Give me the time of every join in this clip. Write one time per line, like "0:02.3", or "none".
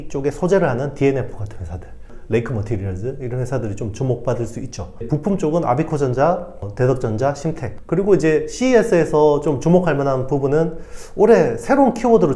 0:05.0
0:07.7

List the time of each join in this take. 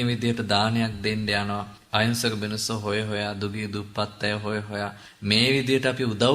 0:01.7
0:05.1

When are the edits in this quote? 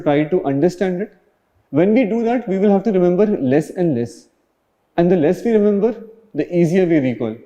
none

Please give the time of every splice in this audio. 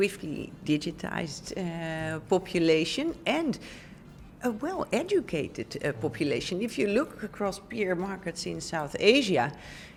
none

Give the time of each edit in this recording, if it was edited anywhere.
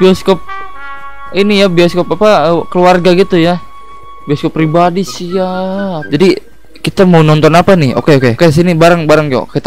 0:06.0

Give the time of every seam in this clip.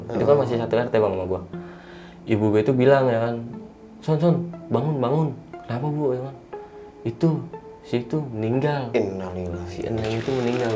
none

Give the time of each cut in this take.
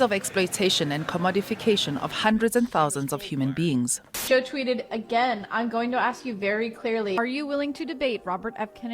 0:04.1

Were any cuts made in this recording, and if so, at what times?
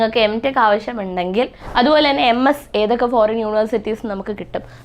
0:01.6

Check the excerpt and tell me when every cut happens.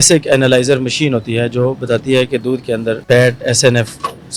none

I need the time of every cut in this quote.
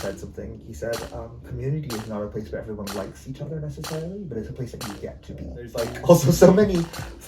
0:05.7

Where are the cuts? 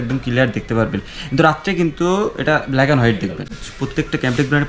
0:03.6

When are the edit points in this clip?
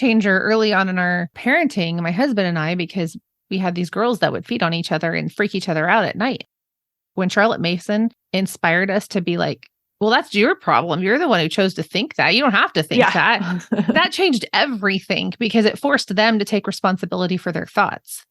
0:01.4

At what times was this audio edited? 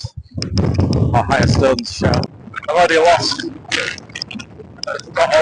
0:02.3

